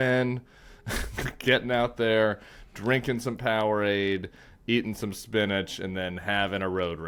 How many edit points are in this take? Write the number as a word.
zero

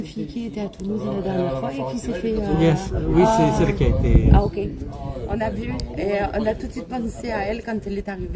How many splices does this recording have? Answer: zero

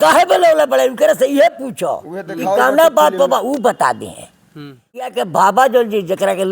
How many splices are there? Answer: one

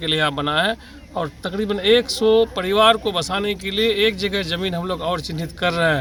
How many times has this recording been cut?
zero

